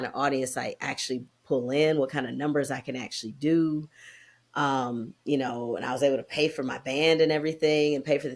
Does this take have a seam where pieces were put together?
no; 0 cuts

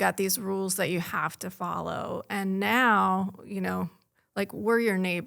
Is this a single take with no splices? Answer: yes; 0 cuts

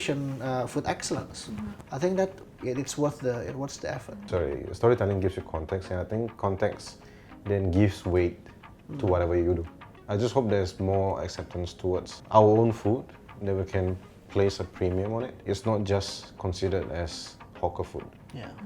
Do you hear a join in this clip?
yes; 4 cuts; at 4.1 s, 9.9 s, 12.2 s, 15.4 s

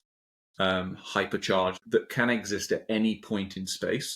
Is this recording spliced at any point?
yes; 1 cut; at 1.8 s

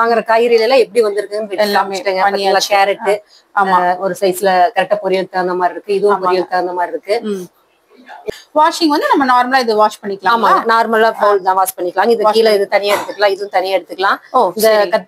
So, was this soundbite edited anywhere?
yes; 1 cut; at 8.3 s

